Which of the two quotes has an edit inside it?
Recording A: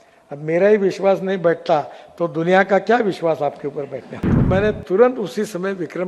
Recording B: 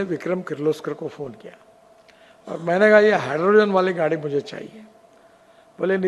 A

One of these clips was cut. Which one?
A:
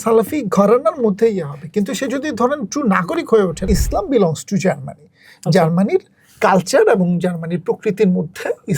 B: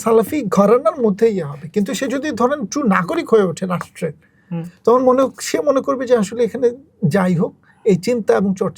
A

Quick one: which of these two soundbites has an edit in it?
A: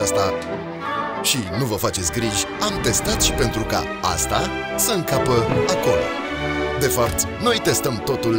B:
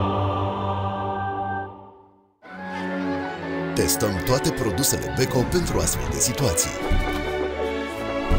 B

